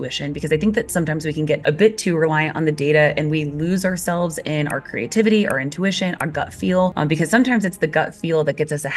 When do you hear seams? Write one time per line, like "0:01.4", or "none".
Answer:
0:01.6
0:06.9